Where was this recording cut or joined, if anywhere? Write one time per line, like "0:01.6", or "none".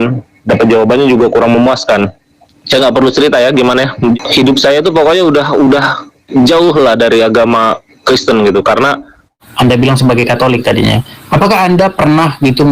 0:04.2
0:09.4